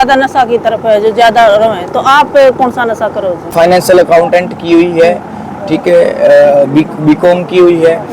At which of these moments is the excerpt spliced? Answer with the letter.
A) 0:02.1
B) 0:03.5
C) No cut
B